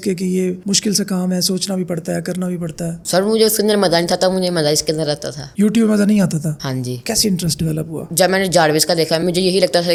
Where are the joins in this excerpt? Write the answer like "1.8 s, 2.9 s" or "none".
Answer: none